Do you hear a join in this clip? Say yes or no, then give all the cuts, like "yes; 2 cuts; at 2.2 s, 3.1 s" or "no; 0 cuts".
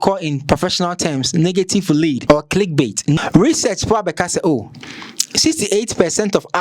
yes; 2 cuts; at 2.2 s, 3.2 s